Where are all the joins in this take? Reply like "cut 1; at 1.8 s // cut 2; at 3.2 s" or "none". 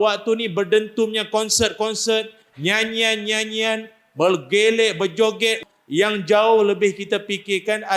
cut 1; at 5.6 s